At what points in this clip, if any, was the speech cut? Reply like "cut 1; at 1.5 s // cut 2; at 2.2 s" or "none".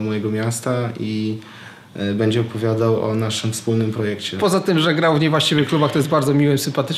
cut 1; at 4.4 s